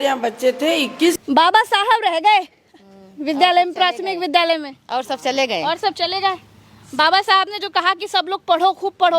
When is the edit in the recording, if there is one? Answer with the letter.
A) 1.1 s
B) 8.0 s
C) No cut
A